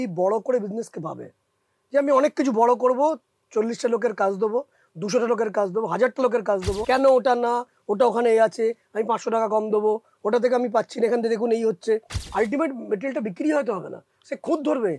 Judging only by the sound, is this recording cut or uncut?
cut